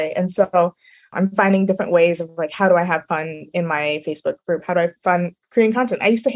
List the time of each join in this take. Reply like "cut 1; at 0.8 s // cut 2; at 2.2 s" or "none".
none